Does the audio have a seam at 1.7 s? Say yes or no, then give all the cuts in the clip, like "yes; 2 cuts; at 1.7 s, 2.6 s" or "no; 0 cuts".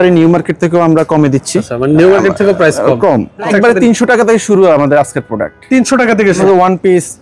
yes; 3 cuts; at 1.7 s, 3.5 s, 6.4 s